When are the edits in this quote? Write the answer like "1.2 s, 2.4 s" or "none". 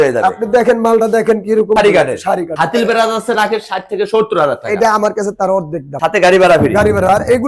1.8 s, 2.5 s, 5.9 s